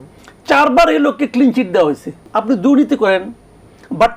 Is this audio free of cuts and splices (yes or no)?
no